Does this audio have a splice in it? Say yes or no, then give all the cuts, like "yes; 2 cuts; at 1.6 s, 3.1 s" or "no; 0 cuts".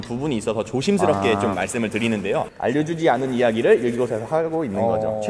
yes; 1 cut; at 2.5 s